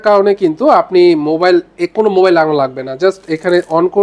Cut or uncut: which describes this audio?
uncut